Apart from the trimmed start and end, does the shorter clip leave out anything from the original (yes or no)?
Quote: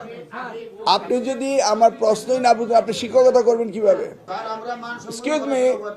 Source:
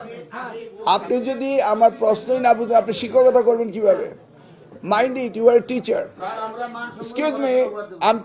yes